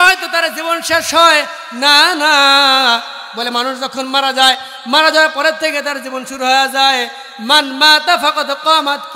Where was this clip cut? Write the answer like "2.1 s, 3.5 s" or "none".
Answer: none